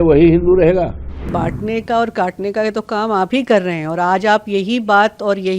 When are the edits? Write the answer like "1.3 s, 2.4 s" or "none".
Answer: 1.3 s